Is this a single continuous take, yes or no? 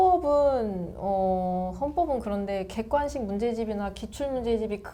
yes